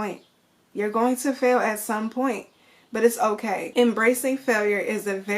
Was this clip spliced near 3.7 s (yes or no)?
yes